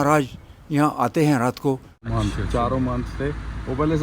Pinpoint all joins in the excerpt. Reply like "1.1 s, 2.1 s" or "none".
2.0 s